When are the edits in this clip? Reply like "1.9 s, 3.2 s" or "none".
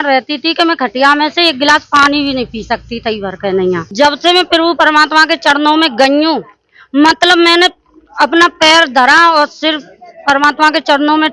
3.9 s

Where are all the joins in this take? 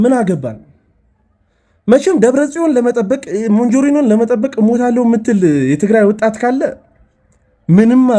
none

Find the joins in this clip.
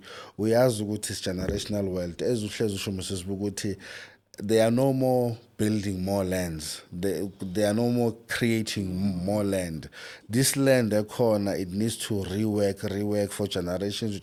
none

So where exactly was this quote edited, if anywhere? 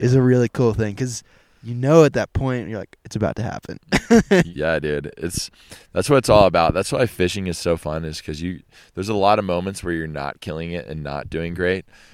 4.5 s

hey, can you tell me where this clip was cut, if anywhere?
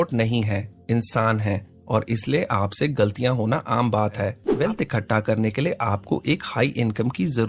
4.4 s

